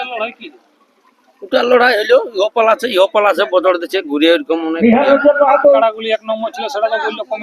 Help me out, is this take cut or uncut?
cut